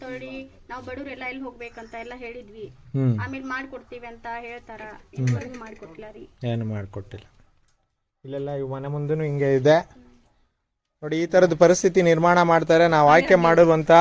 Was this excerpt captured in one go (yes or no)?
yes